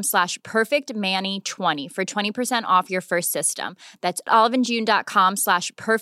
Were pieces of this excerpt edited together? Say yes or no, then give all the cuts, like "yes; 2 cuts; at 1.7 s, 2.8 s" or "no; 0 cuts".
no; 0 cuts